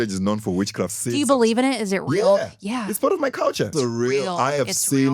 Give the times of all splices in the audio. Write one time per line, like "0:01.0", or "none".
0:00.9
0:03.7